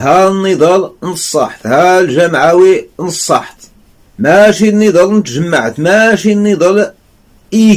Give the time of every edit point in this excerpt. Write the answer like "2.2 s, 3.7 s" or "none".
none